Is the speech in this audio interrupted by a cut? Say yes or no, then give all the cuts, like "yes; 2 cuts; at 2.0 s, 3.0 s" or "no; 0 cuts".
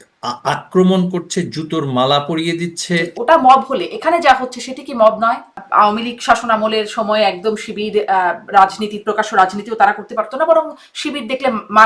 yes; 2 cuts; at 3.1 s, 5.6 s